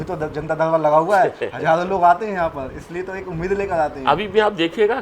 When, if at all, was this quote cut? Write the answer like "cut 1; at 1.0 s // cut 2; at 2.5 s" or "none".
none